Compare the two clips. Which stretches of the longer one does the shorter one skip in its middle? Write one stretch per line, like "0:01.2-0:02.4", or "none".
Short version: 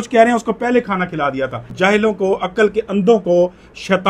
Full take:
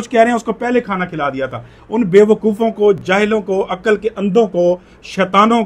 0:01.8-0:03.0

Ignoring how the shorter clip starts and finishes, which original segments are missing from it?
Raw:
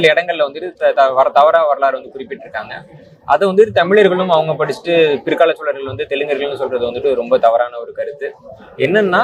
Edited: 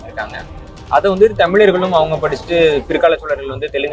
none

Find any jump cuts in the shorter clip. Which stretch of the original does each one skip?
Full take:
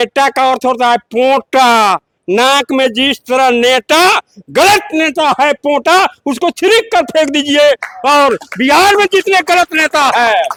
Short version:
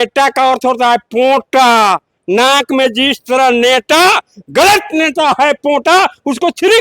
none

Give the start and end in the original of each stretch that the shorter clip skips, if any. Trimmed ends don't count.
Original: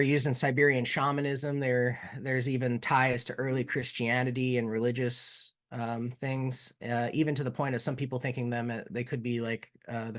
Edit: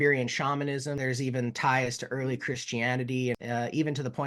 0:01.5-0:02.2
0:04.6-0:06.8

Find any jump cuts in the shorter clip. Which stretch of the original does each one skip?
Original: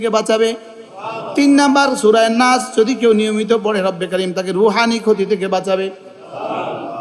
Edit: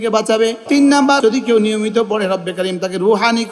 0:01.1-0:02.7

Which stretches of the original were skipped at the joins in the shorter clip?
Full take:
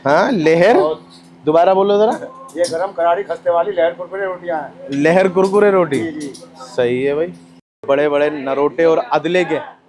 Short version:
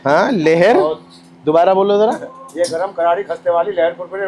none

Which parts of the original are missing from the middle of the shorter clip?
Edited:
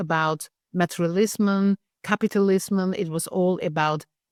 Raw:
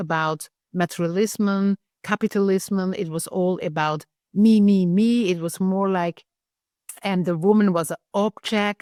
none

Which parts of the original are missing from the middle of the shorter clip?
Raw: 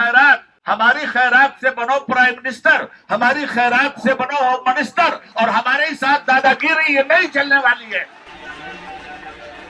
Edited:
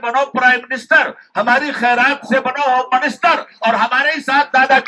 none

